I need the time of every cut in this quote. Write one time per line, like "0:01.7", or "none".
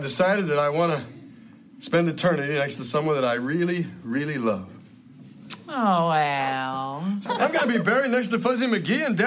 0:07.2